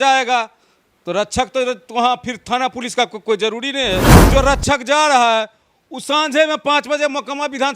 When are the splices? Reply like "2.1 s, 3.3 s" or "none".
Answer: 4.2 s